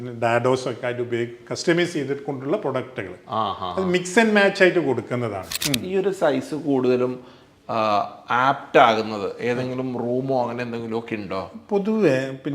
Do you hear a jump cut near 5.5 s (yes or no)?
yes